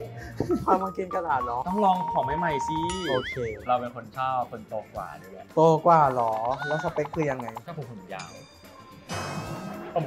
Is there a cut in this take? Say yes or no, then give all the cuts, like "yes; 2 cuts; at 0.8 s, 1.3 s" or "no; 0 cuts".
yes; 2 cuts; at 3.6 s, 7.6 s